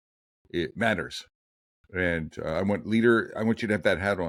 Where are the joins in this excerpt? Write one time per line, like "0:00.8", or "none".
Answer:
none